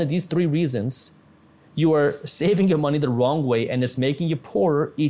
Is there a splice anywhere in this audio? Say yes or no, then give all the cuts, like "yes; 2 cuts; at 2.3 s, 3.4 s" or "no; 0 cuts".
no; 0 cuts